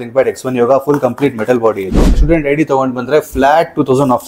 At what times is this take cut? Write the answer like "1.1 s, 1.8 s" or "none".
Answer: 2.2 s